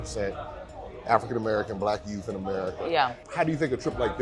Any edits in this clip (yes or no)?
yes